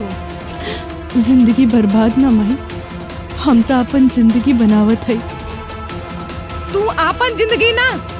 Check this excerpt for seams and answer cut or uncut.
uncut